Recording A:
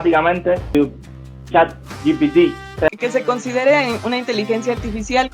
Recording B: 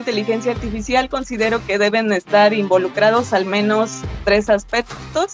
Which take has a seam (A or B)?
A